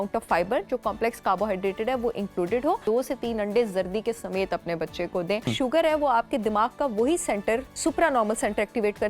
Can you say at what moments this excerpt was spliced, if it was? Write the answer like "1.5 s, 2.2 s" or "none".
2.8 s, 5.5 s, 7.7 s